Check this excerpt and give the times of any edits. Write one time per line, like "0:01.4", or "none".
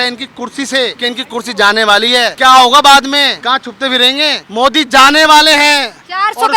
0:01.0
0:02.3
0:03.4
0:04.4